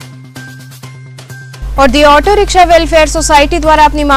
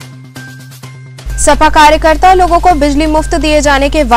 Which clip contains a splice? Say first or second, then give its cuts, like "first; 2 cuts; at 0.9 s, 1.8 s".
first; 1 cut; at 1.2 s